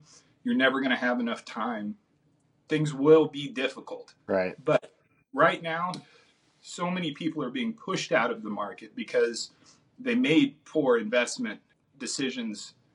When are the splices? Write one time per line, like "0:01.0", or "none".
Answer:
0:11.9